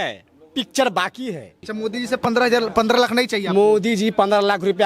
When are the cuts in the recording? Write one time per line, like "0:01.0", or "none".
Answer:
0:01.6

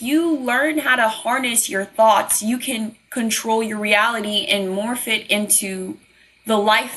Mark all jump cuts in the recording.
none

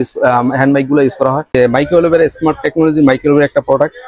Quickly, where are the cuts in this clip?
0:01.5

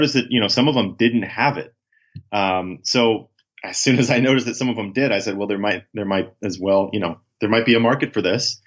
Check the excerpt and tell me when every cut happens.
none

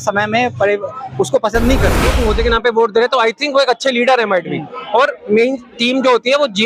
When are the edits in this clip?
0:02.1

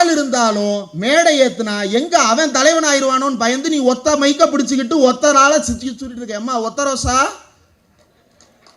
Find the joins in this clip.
none

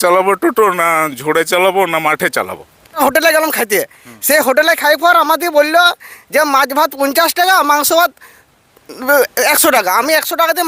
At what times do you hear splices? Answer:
0:03.0

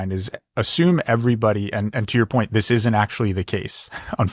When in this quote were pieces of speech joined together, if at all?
none

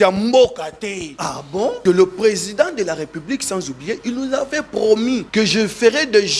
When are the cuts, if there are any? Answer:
0:01.8
0:05.3

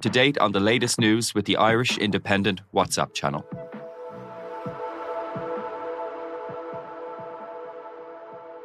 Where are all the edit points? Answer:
none

